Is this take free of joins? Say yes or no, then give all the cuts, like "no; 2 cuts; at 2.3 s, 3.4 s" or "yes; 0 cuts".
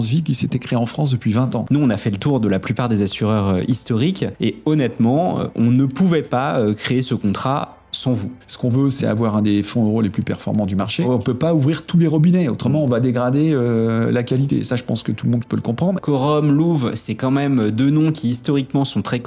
no; 4 cuts; at 1.6 s, 8.4 s, 11.0 s, 16.0 s